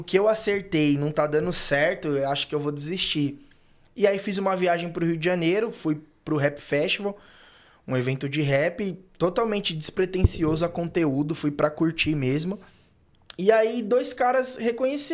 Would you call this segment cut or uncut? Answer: uncut